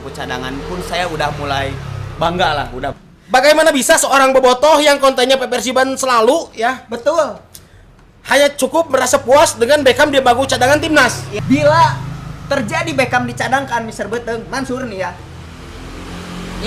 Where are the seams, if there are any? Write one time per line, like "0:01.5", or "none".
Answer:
0:02.9
0:11.2